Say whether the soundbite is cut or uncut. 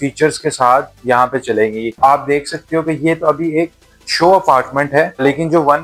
uncut